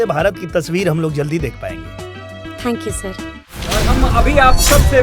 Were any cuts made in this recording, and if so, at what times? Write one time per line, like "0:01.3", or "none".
0:03.7